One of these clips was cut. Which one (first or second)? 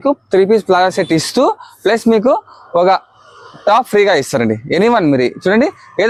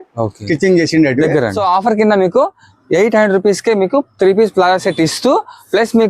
second